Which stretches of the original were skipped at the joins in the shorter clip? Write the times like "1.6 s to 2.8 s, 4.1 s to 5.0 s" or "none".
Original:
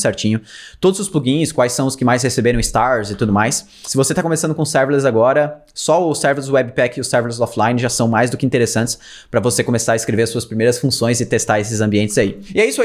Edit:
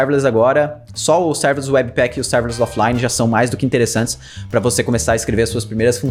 none